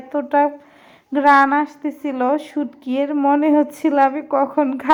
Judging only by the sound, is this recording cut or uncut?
uncut